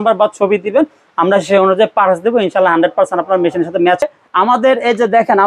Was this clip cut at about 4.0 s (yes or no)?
yes